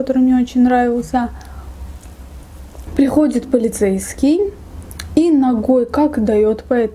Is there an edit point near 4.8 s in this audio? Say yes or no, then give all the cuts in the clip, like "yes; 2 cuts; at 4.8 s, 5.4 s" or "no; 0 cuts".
no; 1 cut; at 2.7 s